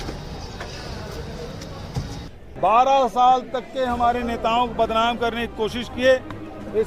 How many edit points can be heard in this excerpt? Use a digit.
1